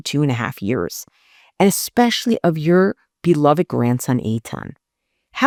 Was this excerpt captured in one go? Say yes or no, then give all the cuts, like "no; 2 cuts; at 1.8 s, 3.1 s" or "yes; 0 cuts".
yes; 0 cuts